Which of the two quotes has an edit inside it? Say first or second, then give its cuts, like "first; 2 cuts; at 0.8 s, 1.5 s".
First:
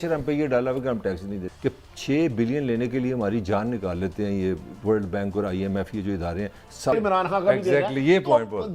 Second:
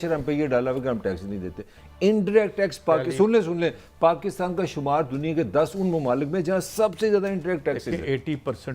first; 2 cuts; at 1.5 s, 6.9 s